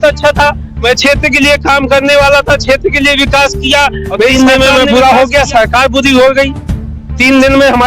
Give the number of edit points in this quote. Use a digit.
1